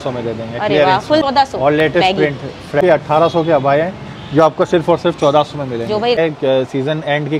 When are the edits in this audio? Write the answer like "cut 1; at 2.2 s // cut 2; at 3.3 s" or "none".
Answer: cut 1; at 1.2 s // cut 2; at 2.8 s // cut 3; at 6.2 s